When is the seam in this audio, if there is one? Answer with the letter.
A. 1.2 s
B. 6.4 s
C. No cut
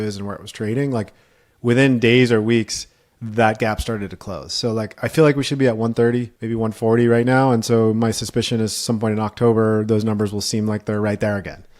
B